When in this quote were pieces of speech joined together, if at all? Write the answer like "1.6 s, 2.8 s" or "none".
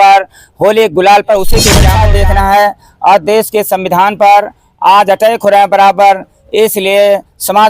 1.8 s